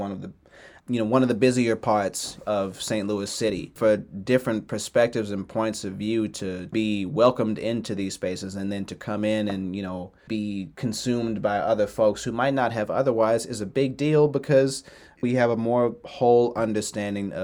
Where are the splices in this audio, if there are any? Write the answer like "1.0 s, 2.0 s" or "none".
3.7 s, 6.7 s, 10.3 s, 15.2 s